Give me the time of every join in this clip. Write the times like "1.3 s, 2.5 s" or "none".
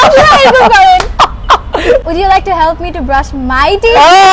2.0 s

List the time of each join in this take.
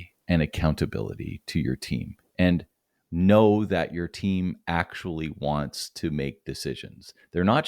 none

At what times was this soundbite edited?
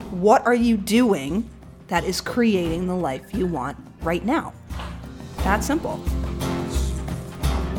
6.4 s

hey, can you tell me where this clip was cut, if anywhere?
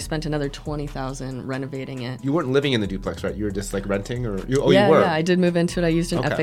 2.2 s

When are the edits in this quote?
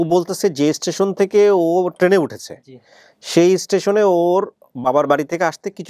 none

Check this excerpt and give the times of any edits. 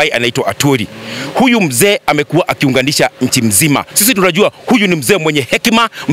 3.9 s

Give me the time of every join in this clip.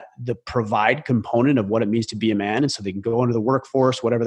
none

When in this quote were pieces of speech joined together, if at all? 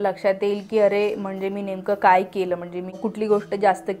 3.0 s

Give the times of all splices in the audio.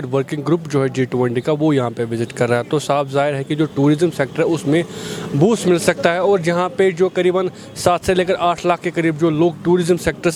none

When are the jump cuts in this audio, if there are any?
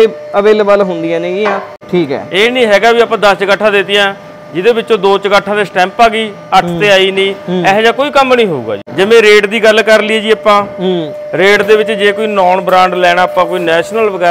1.8 s, 8.8 s

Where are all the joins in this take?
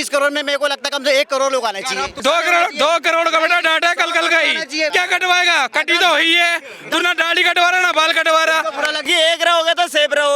2.1 s, 4.9 s, 9.0 s

